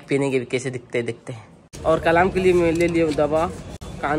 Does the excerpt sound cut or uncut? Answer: cut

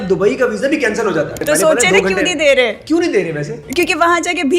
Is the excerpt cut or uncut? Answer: cut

